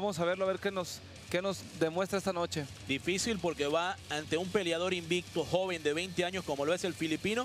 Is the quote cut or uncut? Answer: cut